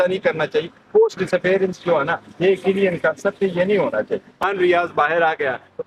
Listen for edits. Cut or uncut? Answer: cut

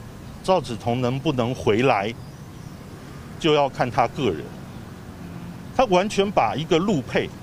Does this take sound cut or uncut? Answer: uncut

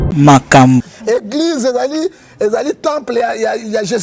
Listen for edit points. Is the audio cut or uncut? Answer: cut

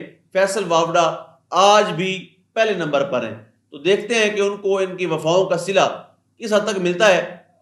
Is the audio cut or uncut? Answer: uncut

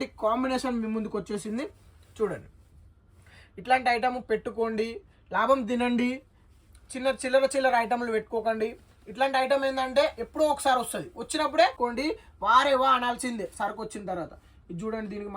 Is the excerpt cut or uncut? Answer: cut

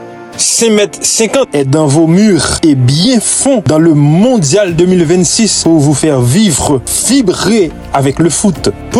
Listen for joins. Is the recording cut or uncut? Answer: uncut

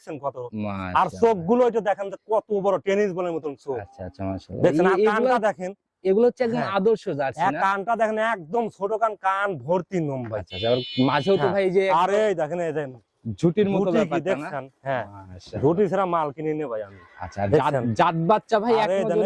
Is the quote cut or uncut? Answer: uncut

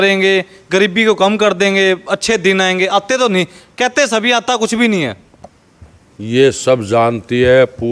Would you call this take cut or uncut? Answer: uncut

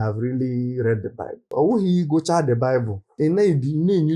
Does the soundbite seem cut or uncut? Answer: cut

